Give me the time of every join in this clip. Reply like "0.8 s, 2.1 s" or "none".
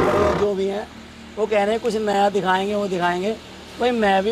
none